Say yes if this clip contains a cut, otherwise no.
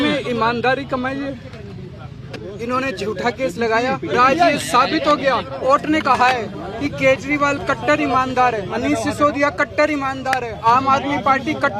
yes